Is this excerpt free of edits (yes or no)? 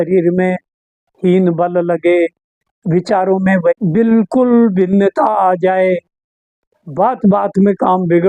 no